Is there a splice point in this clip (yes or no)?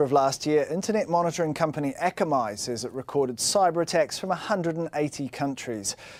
no